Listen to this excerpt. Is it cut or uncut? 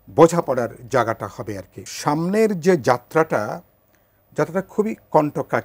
cut